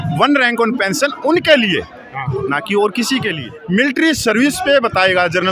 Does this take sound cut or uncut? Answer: cut